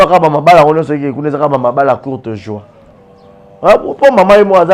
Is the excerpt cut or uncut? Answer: uncut